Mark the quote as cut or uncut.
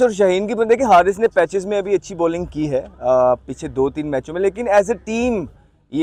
uncut